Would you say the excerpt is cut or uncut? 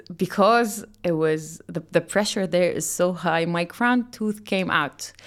uncut